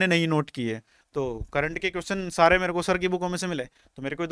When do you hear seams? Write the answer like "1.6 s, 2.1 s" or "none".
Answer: 0.9 s